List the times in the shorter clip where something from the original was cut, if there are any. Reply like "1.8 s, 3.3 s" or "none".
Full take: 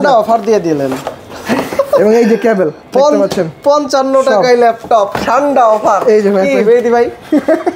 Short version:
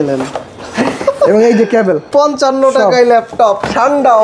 2.0 s